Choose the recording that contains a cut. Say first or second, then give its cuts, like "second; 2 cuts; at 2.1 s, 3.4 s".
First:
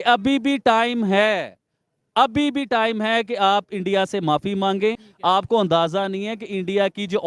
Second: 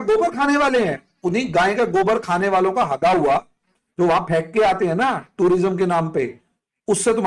first; 1 cut; at 5.1 s